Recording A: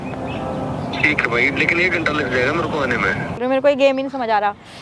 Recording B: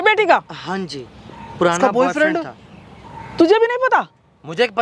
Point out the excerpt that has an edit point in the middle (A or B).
A